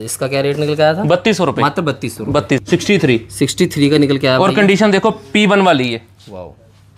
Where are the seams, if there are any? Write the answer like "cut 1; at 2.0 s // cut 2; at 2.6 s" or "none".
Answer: cut 1; at 2.6 s